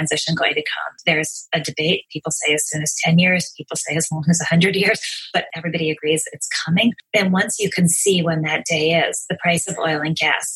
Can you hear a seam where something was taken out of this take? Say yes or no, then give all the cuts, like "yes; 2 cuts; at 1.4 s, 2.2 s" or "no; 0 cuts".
yes; 3 cuts; at 1.0 s, 5.5 s, 7.0 s